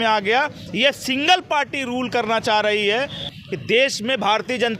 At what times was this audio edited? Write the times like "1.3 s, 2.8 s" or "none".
3.3 s